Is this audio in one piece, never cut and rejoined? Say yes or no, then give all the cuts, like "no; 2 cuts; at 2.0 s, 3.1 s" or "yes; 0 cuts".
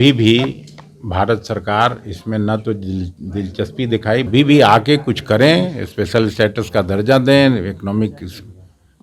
no; 1 cut; at 4.3 s